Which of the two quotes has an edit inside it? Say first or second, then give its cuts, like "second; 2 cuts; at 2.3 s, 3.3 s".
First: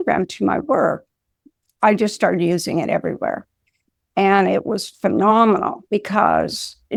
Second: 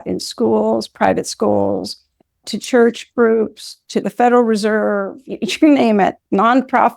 second; 1 cut; at 2.4 s